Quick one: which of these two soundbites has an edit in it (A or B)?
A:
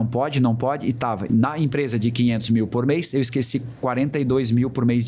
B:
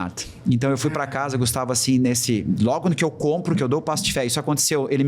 A